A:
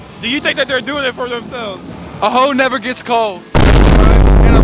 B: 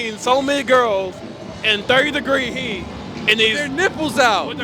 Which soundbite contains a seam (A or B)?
A